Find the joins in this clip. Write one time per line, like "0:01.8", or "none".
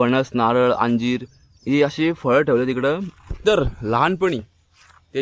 none